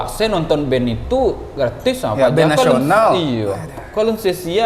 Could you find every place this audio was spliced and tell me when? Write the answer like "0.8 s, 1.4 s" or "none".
none